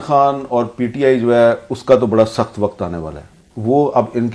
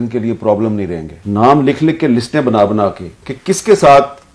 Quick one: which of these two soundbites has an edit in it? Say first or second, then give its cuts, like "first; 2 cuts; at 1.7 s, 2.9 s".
second; 1 cut; at 1.1 s